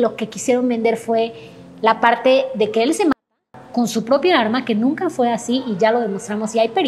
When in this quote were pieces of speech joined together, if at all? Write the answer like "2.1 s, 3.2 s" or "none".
none